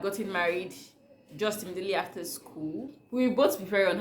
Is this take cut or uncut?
cut